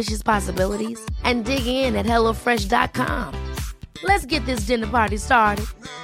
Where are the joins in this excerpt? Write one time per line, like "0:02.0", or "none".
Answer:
none